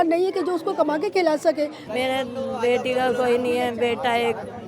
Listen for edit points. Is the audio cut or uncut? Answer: cut